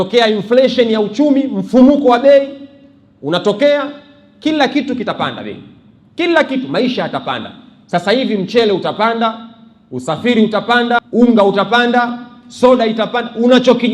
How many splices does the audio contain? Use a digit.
1